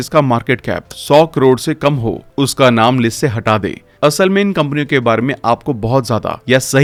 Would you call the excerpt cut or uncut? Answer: uncut